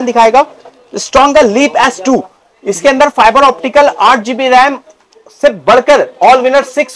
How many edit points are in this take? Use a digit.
0